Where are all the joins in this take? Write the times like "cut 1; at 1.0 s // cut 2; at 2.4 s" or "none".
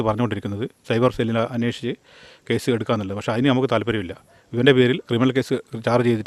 none